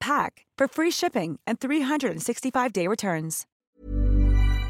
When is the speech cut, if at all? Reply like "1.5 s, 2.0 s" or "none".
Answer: 3.6 s